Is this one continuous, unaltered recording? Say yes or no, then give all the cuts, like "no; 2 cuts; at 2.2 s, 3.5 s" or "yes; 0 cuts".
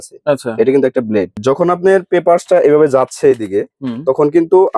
no; 1 cut; at 1.4 s